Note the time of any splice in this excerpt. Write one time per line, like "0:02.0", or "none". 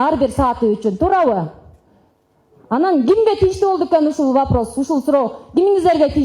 none

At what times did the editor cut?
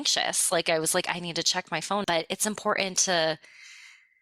0:02.0

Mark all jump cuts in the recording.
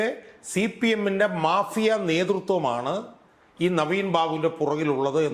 none

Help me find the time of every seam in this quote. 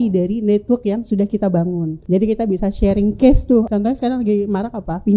0:01.9
0:03.7

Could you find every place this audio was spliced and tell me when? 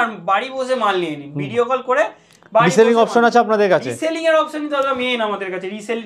none

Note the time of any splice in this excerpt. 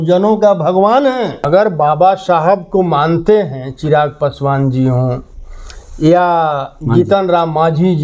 0:01.4

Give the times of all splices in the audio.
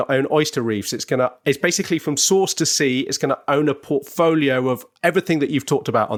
none

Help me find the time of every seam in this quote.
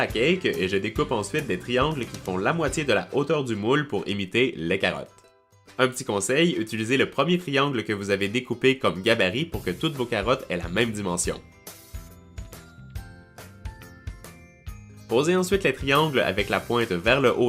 0:06.6

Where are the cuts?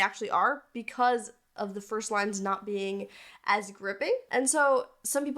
0:04.3

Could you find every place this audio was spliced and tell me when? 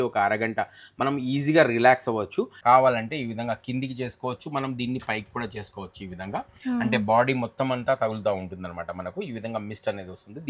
0:02.5

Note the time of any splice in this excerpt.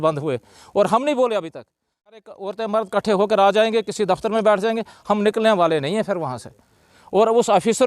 0:02.2

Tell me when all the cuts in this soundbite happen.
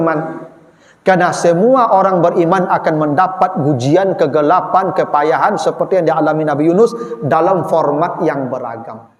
none

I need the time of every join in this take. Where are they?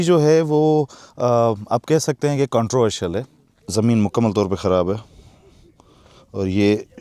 0:03.2

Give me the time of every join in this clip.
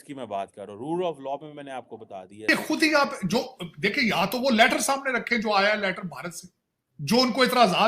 0:02.3

